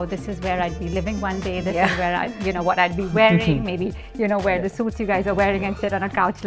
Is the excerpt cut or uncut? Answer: uncut